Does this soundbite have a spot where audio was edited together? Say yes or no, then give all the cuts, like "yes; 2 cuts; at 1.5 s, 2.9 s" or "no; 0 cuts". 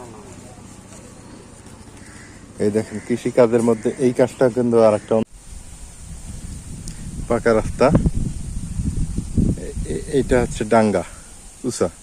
yes; 1 cut; at 5.2 s